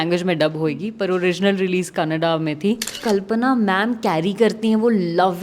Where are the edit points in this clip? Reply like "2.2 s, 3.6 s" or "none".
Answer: 2.9 s